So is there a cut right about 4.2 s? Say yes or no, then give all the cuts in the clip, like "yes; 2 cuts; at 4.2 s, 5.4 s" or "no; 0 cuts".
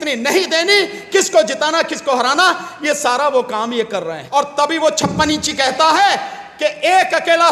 yes; 1 cut; at 4.2 s